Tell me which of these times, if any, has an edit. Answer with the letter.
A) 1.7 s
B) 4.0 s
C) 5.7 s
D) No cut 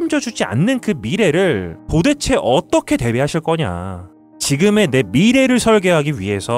B